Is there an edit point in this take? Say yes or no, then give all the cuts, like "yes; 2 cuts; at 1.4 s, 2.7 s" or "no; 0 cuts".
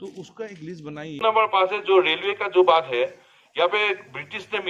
yes; 1 cut; at 1.2 s